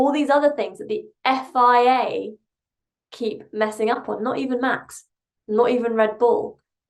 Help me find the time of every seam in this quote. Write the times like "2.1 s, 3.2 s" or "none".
none